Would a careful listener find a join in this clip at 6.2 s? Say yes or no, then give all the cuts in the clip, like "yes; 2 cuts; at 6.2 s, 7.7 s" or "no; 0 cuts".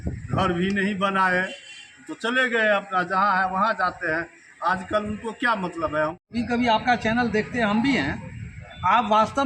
yes; 1 cut; at 6.2 s